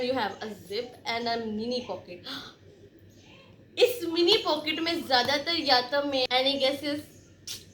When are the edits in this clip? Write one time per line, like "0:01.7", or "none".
0:06.3